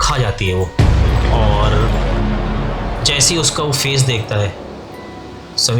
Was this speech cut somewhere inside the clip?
no; 0 cuts

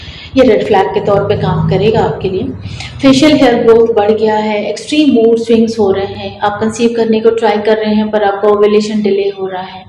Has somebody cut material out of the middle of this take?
no; 0 cuts

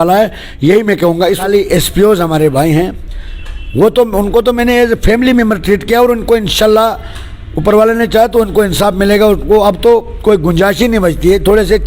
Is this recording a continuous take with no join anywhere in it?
no; 1 cut; at 1.4 s

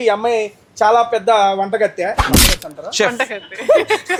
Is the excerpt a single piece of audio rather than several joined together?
yes; 0 cuts

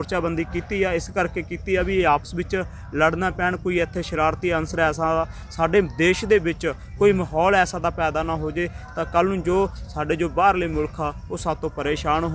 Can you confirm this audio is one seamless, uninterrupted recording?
yes; 0 cuts

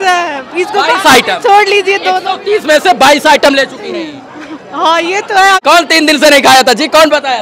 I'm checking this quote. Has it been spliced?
yes; 1 cut; at 5.6 s

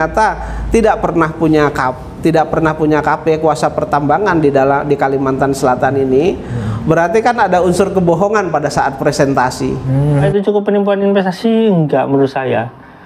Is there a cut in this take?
yes; 1 cut; at 10.3 s

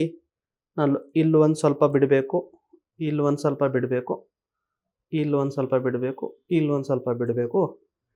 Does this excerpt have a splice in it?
no; 0 cuts

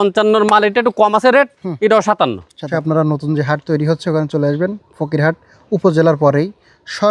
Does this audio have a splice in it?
yes; 1 cut; at 2.7 s

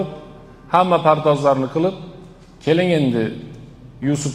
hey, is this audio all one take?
yes; 0 cuts

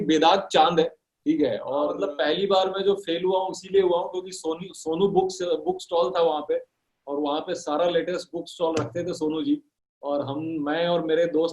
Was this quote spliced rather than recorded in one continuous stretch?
yes; 1 cut; at 1.9 s

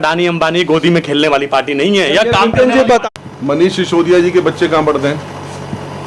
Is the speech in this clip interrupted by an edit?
yes; 1 cut; at 3.0 s

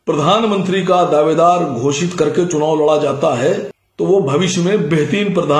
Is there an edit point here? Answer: yes; 1 cut; at 3.8 s

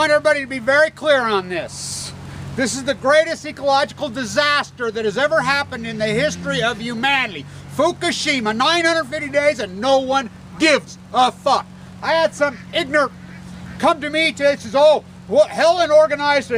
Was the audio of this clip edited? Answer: yes; 1 cut; at 9.8 s

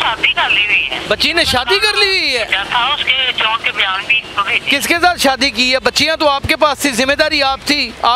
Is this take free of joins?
no; 1 cut; at 1.0 s

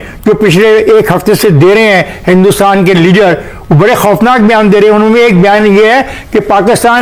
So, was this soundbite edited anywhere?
no; 0 cuts

